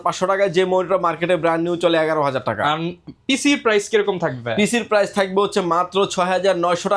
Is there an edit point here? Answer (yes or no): no